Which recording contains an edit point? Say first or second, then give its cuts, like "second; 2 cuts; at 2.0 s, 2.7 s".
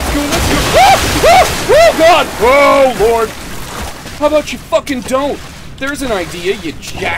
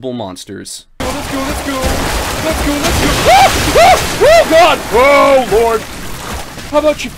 second; 1 cut; at 1.0 s